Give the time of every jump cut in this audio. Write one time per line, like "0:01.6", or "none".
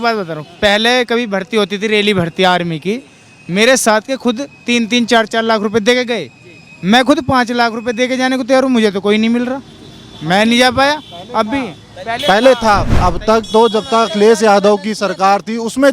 0:12.9